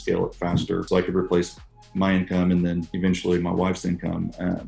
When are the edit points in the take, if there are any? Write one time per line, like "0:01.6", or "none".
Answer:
0:00.8
0:02.9